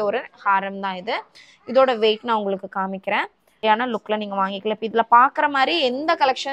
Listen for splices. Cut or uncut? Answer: cut